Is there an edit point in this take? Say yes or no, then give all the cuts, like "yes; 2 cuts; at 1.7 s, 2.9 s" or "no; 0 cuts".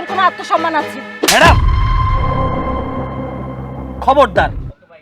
no; 0 cuts